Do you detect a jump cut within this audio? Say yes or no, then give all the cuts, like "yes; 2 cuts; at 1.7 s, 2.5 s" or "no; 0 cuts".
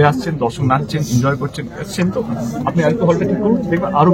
no; 0 cuts